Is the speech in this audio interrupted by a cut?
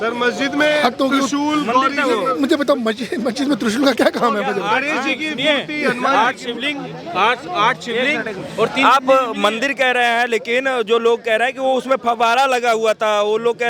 no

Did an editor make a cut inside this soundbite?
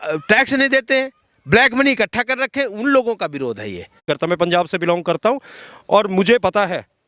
yes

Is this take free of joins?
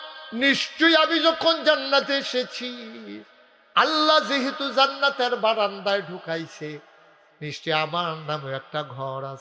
yes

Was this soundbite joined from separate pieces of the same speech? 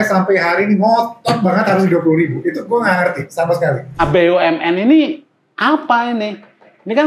yes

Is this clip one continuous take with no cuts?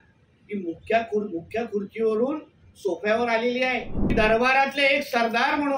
no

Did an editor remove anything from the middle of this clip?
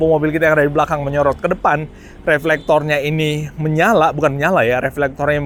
no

